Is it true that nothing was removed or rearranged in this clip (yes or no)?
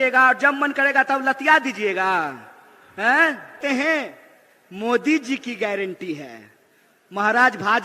no